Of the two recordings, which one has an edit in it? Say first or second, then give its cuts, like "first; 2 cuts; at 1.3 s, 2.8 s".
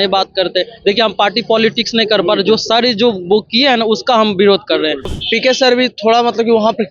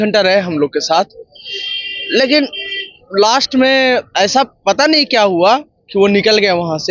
first; 1 cut; at 5.2 s